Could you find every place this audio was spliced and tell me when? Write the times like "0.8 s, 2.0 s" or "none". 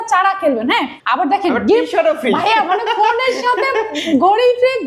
1.0 s